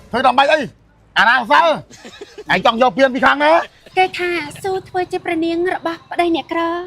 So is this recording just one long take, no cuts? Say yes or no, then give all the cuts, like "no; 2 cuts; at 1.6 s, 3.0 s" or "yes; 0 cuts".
no; 1 cut; at 3.8 s